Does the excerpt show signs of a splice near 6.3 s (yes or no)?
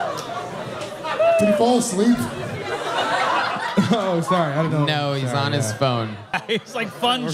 yes